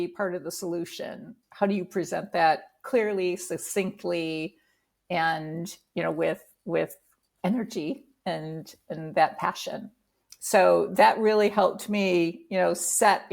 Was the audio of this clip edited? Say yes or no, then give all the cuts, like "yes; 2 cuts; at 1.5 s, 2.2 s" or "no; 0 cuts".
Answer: yes; 1 cut; at 1.4 s